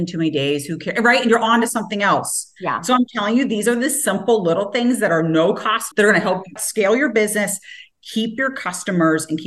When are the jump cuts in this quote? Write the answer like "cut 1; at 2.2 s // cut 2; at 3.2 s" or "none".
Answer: cut 1; at 5.9 s